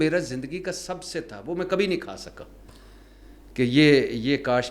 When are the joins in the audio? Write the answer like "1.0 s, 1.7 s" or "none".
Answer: none

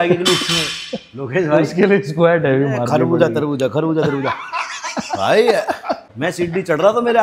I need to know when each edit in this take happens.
6.1 s

